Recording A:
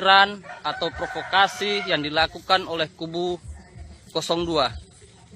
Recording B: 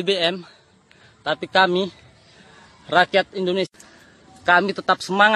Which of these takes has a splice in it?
B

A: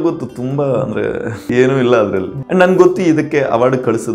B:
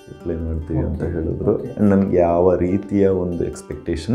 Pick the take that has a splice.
A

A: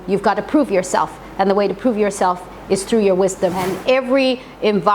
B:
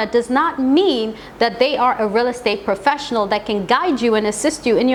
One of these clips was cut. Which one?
A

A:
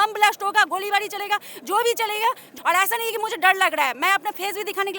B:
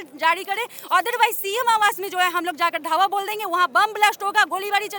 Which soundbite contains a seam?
A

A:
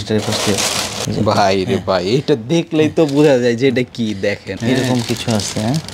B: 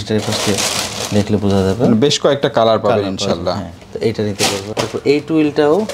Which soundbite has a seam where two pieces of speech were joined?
A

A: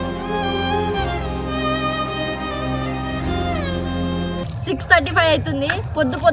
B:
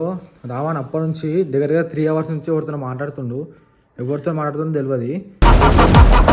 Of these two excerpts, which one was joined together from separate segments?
A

